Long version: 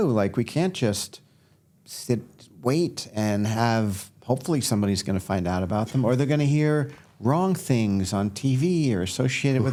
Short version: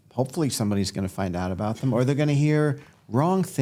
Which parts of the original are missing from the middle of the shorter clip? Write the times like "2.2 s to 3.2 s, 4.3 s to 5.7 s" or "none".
none